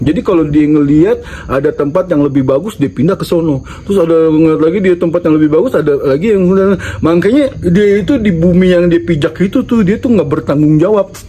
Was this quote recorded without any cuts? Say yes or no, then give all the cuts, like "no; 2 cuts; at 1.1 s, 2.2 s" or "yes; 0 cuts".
yes; 0 cuts